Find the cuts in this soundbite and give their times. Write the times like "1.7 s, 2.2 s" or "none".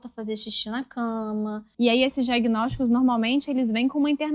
1.6 s